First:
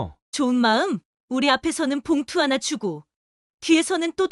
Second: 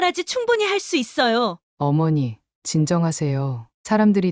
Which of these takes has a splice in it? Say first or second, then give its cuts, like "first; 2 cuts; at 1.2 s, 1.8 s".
second; 1 cut; at 1.6 s